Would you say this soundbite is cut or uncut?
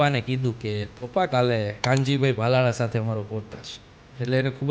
cut